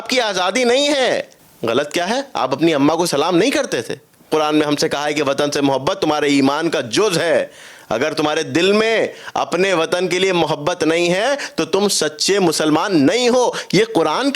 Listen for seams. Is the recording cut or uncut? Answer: cut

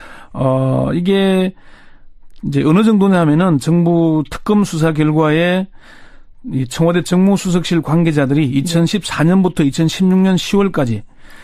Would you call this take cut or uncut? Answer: uncut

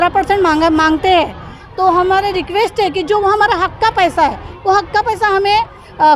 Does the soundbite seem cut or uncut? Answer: uncut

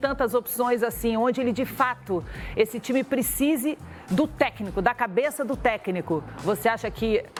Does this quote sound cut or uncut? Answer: uncut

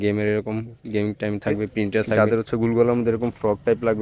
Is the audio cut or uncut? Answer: cut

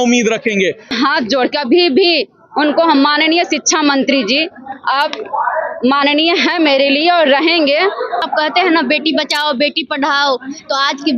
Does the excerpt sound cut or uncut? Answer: cut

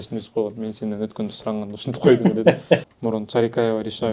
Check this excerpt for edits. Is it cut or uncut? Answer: cut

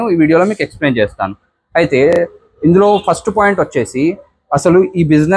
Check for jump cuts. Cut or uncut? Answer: uncut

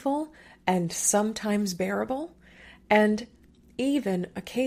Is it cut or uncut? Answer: uncut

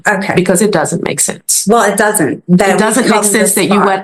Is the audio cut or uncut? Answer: uncut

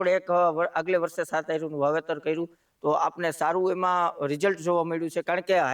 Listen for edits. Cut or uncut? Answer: cut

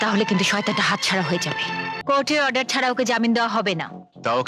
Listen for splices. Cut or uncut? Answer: cut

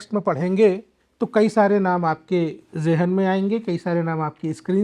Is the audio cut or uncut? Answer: uncut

